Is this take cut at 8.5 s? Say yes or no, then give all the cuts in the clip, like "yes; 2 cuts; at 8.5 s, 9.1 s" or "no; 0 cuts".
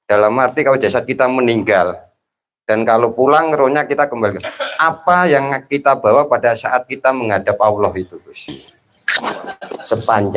yes; 1 cut; at 8.5 s